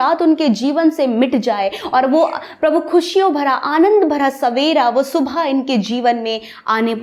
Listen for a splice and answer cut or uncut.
uncut